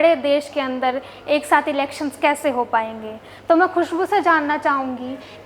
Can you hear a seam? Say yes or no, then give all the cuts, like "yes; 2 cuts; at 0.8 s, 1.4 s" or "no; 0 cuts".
no; 0 cuts